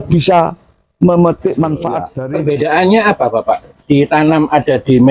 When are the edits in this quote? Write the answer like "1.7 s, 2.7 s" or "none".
2.1 s